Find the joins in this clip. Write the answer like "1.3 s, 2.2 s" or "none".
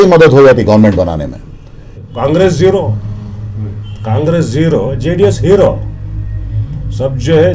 2.1 s